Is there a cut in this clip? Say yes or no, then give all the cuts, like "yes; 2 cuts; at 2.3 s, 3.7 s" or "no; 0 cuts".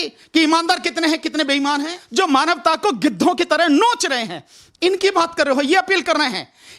yes; 1 cut; at 2.0 s